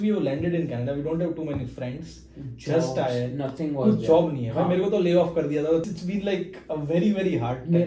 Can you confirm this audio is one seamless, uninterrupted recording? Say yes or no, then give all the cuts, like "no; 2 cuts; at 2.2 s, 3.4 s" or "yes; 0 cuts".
no; 1 cut; at 5.8 s